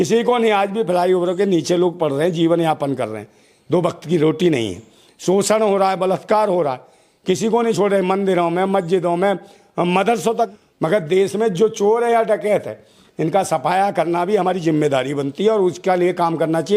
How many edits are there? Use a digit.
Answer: 1